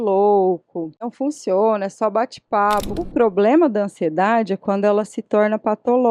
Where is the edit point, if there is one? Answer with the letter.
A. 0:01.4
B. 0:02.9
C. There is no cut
B